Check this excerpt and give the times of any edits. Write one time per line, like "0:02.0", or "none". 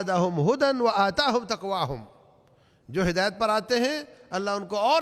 none